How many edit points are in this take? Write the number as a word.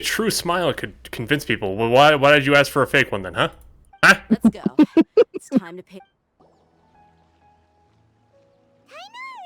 zero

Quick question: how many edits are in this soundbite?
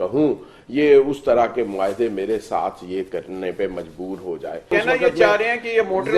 one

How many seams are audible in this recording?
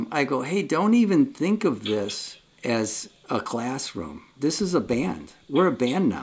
one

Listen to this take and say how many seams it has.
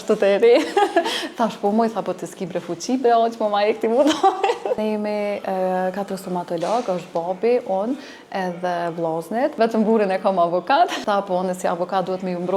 three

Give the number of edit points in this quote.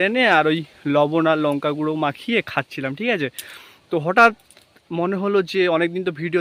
zero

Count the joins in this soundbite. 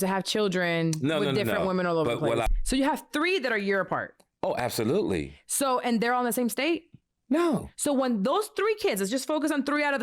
one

